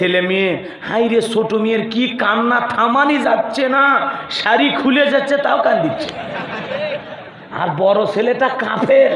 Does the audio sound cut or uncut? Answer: cut